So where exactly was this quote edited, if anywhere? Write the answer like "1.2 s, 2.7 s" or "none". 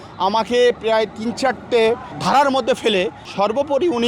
2.1 s, 3.2 s